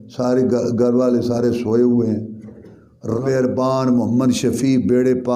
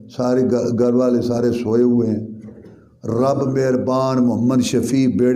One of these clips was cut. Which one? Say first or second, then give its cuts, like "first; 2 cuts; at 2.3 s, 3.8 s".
first; 1 cut; at 3.2 s